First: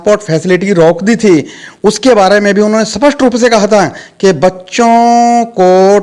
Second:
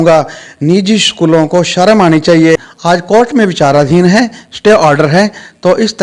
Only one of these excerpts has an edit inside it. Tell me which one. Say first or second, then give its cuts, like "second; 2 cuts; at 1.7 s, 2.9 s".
second; 1 cut; at 2.7 s